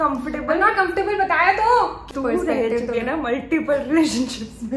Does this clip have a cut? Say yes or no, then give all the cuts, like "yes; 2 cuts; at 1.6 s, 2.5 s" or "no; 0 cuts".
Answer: yes; 1 cut; at 2.0 s